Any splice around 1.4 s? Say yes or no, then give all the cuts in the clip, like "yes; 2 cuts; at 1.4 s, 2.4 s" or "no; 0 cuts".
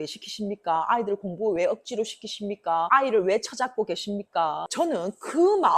no; 2 cuts; at 2.9 s, 4.7 s